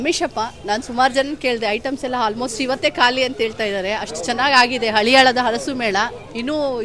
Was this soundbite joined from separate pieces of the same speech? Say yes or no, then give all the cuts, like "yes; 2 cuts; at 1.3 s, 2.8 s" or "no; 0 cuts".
no; 0 cuts